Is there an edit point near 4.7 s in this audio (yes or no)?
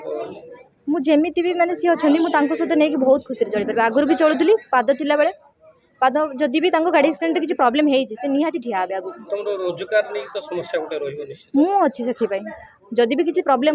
no